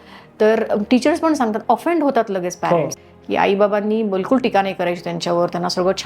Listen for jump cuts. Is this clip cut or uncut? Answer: cut